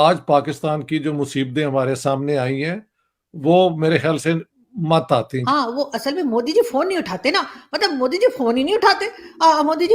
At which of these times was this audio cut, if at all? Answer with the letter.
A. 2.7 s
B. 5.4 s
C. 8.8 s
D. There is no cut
B